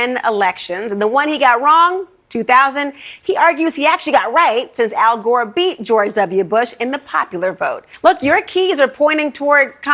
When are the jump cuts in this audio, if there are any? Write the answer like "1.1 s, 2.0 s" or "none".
7.8 s